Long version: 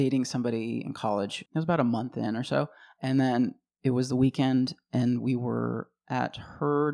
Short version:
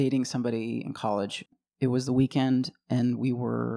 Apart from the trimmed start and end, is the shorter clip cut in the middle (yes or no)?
yes